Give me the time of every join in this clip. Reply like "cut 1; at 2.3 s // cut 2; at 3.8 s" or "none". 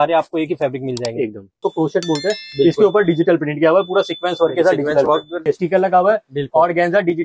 cut 1; at 1.6 s // cut 2; at 5.4 s